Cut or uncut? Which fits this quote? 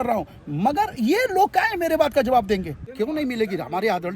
cut